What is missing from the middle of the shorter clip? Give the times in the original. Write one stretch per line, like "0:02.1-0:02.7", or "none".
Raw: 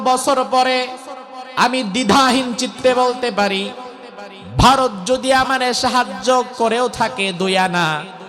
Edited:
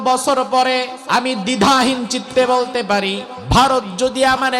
0:00.9-0:01.4
0:03.8-0:04.4